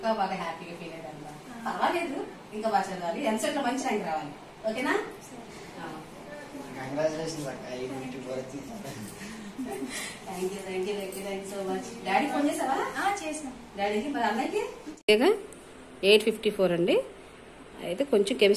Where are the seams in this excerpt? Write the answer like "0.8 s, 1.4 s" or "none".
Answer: 14.9 s